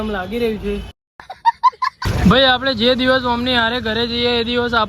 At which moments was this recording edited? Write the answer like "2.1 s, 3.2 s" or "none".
2.0 s